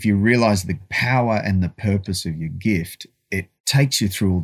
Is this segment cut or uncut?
cut